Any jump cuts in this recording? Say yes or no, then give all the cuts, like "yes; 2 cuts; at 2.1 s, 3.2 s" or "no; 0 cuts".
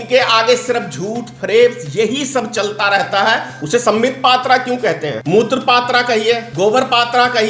yes; 3 cuts; at 3.5 s, 5.2 s, 6.5 s